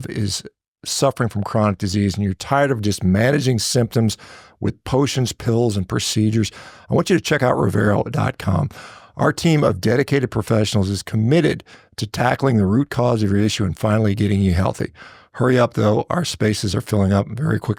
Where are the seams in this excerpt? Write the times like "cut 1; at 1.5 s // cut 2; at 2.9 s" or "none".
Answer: none